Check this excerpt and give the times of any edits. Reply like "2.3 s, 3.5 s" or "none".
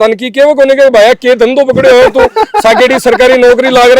none